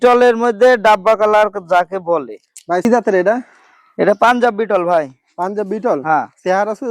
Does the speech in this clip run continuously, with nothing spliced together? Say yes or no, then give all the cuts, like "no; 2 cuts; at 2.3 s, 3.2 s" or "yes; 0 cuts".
no; 1 cut; at 2.8 s